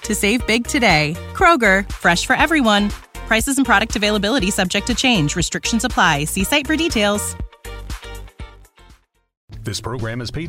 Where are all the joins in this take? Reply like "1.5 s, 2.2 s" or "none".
9.6 s